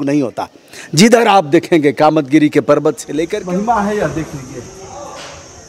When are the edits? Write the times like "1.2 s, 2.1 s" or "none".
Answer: 3.1 s